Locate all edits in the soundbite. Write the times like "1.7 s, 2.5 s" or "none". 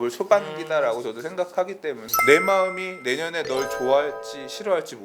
2.1 s

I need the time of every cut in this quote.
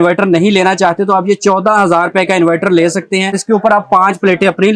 3.4 s

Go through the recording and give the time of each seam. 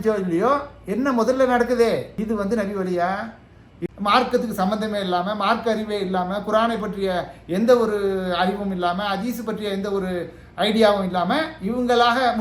2.1 s, 3.7 s

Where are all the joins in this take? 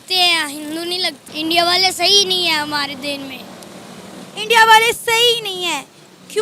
1.2 s

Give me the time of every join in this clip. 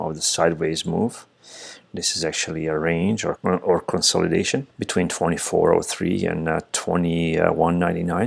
3.4 s, 4.8 s

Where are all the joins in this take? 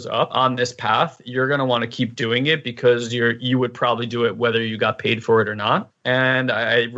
none

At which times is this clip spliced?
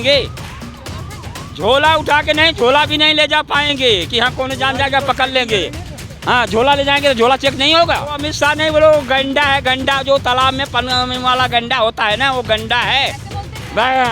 8.3 s

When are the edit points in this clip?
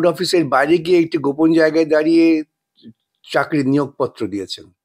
none

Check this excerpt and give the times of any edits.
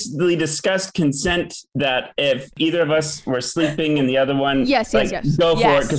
none

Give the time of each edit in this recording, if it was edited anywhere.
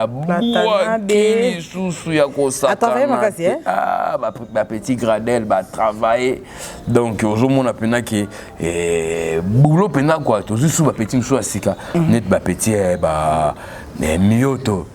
none

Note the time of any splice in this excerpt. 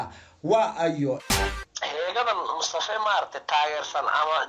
1.2 s

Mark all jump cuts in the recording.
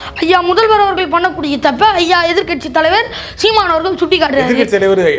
none

